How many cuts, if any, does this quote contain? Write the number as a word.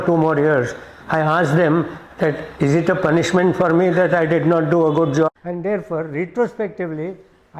one